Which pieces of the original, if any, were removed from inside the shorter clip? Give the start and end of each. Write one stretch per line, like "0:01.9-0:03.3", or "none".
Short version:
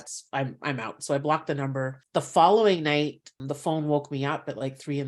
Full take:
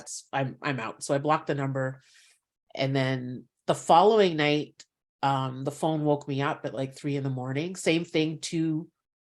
0:02.0-0:03.5
0:05.0-0:05.6